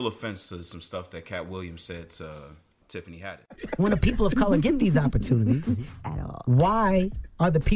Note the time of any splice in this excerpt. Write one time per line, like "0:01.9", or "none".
none